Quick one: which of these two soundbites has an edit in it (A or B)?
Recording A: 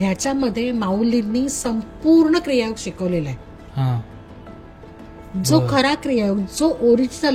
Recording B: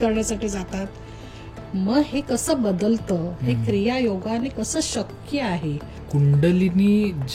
B